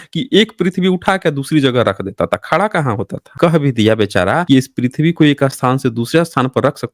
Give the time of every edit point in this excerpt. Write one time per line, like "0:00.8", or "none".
0:03.2
0:04.4